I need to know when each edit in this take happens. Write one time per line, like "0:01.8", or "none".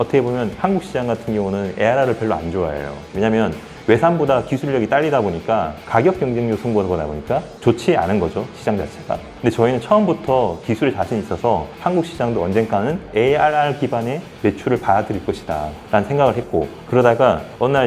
0:16.7